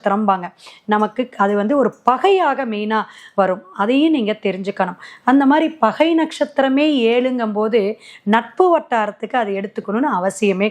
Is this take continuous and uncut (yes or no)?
yes